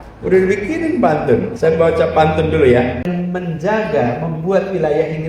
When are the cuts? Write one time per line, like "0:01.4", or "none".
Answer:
0:03.1